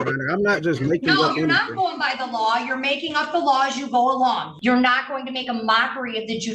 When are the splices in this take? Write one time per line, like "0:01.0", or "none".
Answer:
0:04.5